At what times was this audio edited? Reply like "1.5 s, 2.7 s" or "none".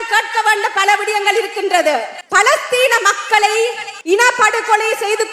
2.2 s, 3.9 s